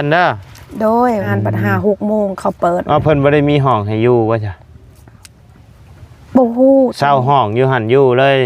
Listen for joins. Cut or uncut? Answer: cut